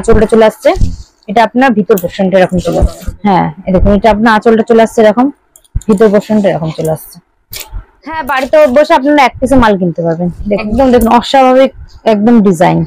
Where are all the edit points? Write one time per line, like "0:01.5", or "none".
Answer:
0:03.1
0:08.2
0:10.6